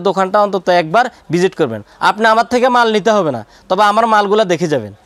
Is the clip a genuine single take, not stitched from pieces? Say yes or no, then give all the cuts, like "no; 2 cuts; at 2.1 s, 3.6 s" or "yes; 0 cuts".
yes; 0 cuts